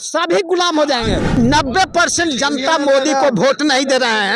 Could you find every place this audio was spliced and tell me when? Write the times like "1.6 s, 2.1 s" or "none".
1.3 s